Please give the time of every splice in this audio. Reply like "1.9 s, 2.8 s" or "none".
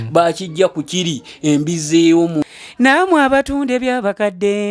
2.4 s